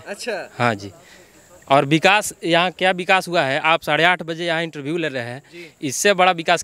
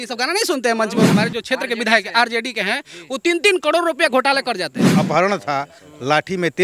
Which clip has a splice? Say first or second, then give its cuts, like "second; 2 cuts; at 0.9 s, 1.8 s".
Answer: second; 2 cuts; at 1.1 s, 4.9 s